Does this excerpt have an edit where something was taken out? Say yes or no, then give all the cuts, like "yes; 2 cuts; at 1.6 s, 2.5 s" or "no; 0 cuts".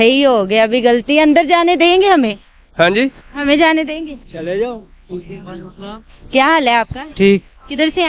no; 0 cuts